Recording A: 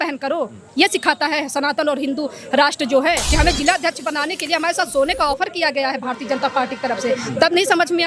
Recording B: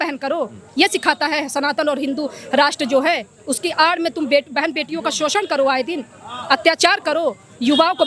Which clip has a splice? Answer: A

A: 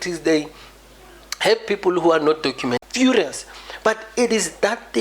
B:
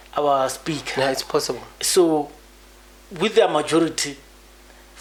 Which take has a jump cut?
A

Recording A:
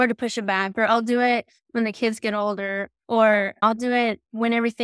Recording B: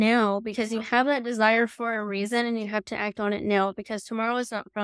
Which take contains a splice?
A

